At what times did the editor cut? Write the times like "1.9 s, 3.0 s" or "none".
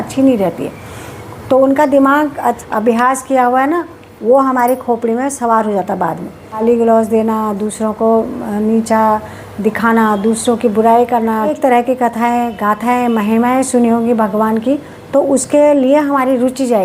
2.6 s, 6.6 s, 11.5 s